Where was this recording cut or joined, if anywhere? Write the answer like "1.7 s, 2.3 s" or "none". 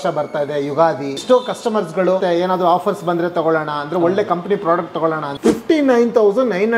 1.2 s, 2.2 s, 5.3 s